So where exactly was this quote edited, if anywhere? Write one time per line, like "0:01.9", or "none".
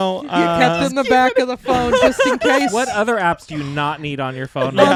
none